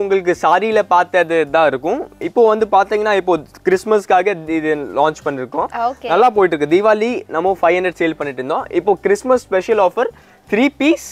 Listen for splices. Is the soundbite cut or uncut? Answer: uncut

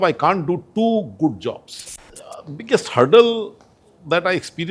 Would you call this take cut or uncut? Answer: cut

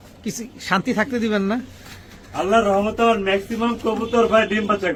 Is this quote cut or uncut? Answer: uncut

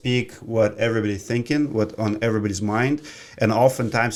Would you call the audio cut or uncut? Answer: uncut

